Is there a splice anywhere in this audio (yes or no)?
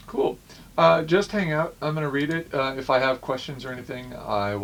no